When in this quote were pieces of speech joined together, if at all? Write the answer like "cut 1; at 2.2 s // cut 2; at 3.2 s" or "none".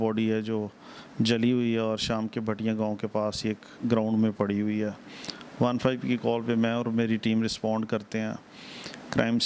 none